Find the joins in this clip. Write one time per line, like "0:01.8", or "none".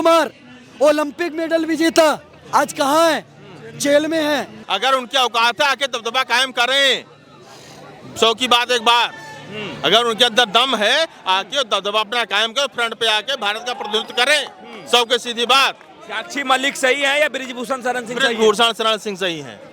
0:04.6